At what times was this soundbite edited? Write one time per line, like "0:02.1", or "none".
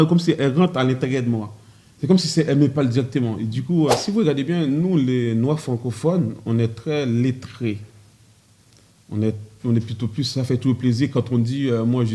0:04.0